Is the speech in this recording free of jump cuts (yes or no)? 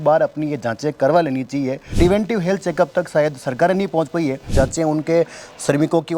no